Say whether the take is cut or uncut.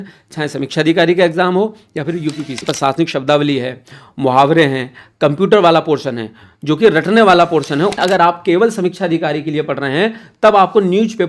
cut